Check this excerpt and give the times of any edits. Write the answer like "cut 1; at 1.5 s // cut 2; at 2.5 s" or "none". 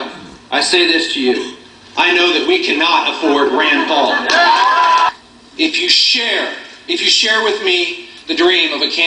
cut 1; at 5.2 s